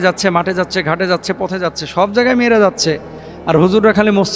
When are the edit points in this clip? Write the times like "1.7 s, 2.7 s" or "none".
none